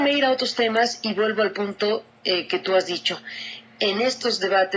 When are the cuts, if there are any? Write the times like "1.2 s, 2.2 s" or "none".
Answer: 1.4 s